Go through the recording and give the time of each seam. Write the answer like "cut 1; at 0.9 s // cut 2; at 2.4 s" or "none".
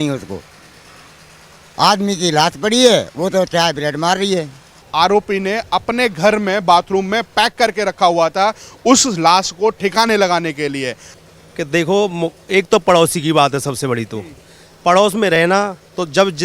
cut 1; at 4.8 s // cut 2; at 11.1 s